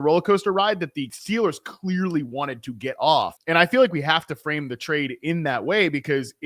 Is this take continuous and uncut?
no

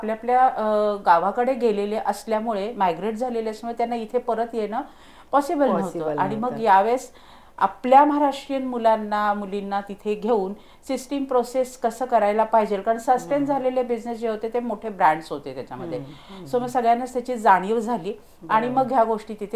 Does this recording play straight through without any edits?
yes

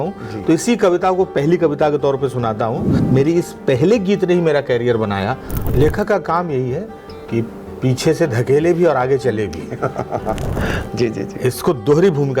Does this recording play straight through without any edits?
no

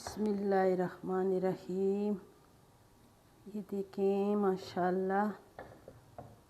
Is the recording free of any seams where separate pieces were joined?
yes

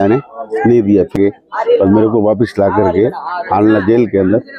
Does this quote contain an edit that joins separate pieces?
yes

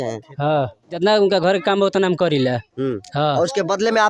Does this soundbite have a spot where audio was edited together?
yes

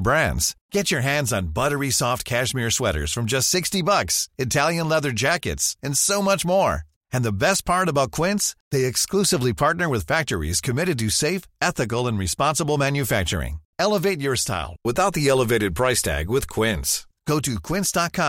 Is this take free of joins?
yes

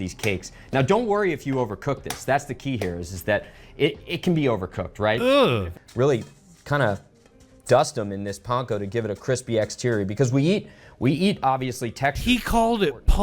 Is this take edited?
yes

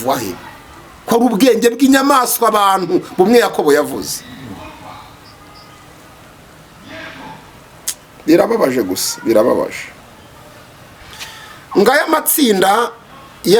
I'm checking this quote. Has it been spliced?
no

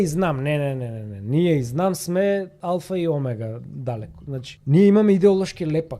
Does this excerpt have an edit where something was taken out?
yes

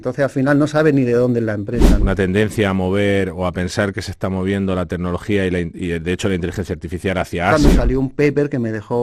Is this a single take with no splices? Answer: no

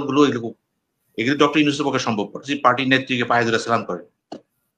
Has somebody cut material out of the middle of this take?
yes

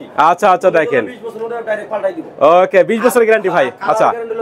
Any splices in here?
no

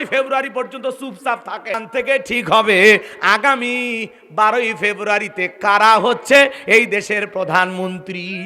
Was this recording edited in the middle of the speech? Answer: yes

